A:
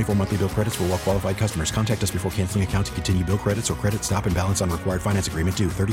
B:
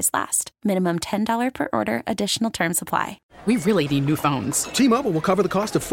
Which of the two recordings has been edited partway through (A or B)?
B